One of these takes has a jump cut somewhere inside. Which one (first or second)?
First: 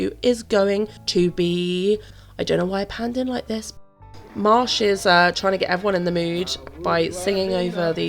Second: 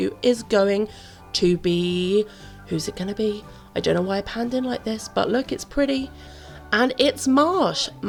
first